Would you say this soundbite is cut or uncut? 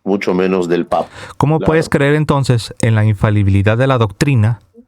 cut